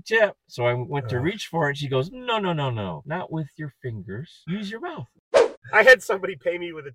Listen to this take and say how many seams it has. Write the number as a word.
three